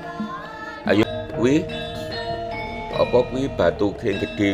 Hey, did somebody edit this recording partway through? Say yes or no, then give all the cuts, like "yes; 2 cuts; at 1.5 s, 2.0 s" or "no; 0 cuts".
yes; 1 cut; at 1.0 s